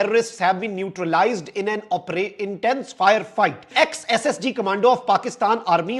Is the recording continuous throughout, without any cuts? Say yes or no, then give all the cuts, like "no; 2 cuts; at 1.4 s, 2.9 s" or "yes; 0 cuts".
no; 1 cut; at 3.7 s